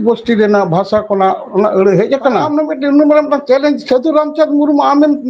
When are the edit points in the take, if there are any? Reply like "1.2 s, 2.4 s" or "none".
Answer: 2.5 s